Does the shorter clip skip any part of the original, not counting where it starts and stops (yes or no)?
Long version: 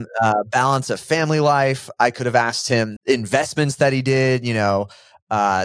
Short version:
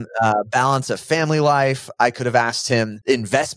no